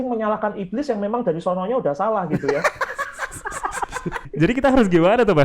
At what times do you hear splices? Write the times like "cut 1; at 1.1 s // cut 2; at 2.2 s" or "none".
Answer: cut 1; at 4.2 s